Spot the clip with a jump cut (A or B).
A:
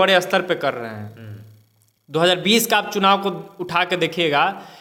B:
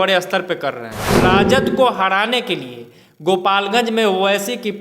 B